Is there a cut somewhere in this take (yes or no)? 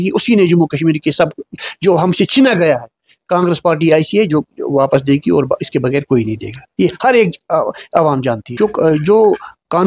yes